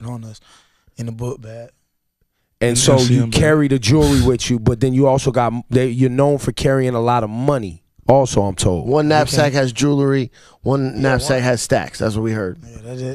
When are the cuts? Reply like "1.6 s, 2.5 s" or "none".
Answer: 4.4 s